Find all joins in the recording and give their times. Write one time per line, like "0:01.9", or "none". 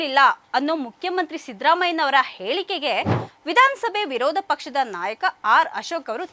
none